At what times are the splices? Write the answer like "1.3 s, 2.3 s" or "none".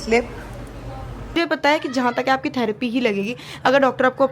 1.3 s